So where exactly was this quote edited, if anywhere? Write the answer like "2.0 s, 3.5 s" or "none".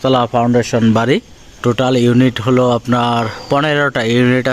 1.5 s